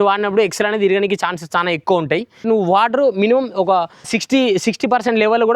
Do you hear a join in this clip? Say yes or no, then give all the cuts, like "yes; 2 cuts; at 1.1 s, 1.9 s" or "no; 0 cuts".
yes; 2 cuts; at 2.3 s, 4.2 s